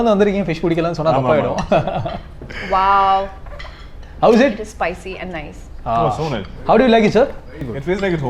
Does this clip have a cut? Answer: no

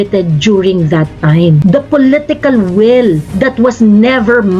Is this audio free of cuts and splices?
no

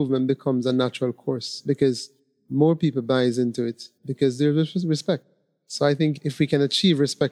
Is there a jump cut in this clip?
no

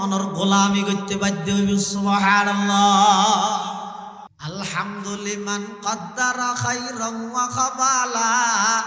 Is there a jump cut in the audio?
yes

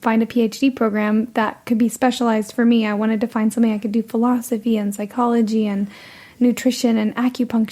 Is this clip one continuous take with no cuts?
yes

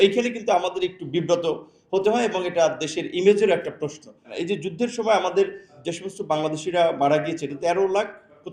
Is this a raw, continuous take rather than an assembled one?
no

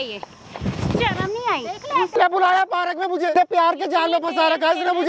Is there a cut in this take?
yes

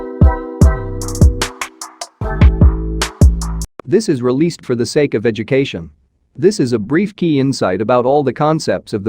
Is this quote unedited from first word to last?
no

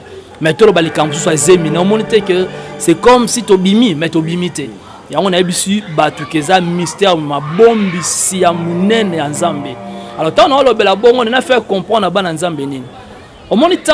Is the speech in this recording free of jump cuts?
yes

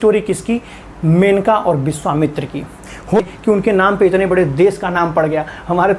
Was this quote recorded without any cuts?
no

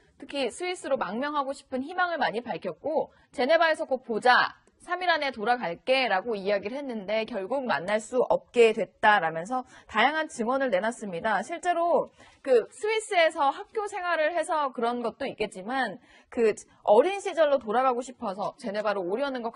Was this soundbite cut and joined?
yes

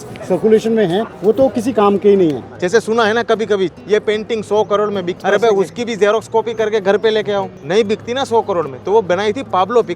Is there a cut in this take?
yes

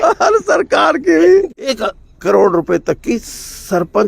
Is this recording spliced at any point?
yes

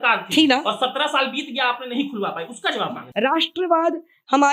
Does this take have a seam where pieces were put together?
yes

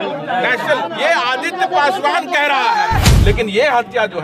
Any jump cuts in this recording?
yes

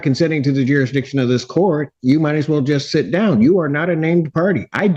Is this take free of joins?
yes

